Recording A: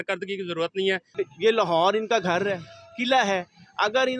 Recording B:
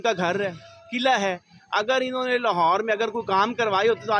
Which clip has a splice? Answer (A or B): A